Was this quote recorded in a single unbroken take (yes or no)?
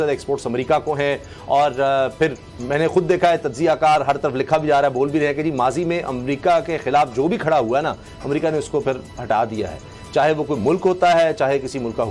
yes